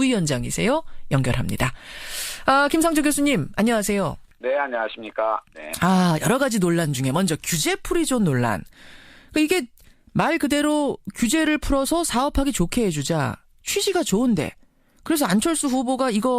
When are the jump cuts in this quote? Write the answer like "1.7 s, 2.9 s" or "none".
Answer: 8.3 s